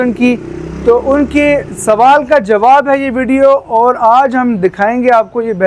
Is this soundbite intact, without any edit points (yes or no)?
yes